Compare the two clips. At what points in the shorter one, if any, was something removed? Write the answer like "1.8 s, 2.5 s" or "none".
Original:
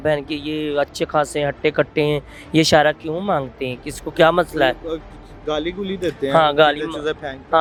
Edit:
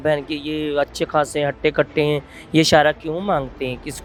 none